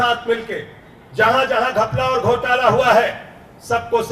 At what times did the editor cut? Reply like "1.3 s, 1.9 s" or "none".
none